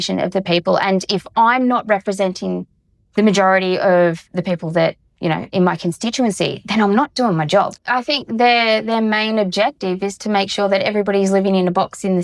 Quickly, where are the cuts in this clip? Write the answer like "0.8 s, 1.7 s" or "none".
7.8 s